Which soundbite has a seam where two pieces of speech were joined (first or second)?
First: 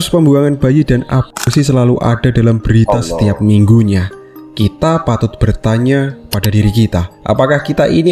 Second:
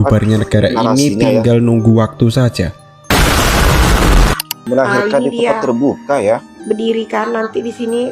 second